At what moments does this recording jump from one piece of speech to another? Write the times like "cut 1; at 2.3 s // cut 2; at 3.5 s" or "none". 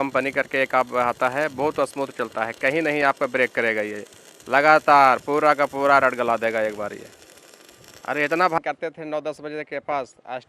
cut 1; at 8.6 s